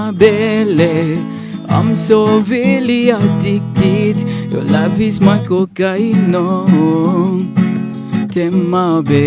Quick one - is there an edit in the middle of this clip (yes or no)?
no